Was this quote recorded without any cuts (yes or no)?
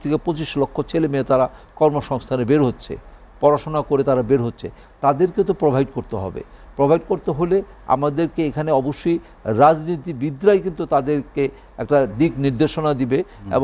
yes